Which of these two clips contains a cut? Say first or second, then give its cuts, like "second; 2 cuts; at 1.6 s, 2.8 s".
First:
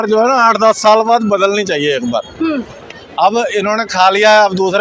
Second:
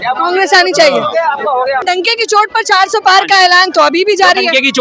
second; 1 cut; at 1.8 s